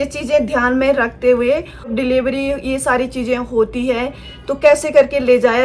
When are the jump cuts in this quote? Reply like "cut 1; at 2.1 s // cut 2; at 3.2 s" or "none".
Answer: cut 1; at 1.9 s